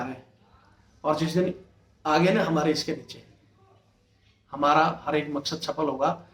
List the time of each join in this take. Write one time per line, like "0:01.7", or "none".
none